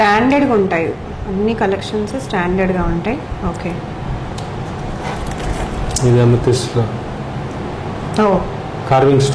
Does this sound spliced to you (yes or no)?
no